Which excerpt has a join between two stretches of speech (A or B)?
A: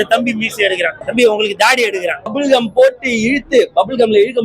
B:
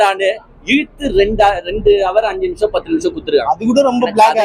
A